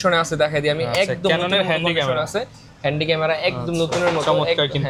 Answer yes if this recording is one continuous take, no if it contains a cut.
yes